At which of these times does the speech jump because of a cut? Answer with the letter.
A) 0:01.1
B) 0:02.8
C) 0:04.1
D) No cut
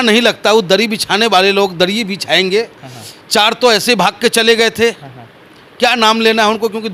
D